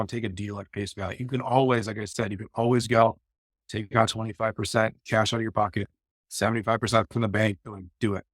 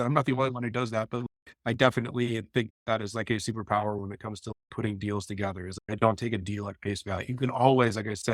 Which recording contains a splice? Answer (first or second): second